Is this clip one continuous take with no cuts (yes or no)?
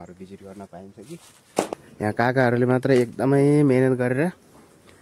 no